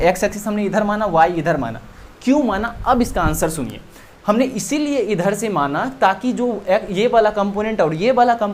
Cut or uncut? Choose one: uncut